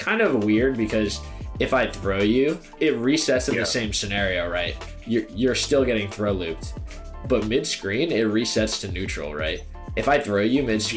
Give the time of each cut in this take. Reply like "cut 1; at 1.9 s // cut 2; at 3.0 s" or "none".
cut 1; at 7.2 s // cut 2; at 9.7 s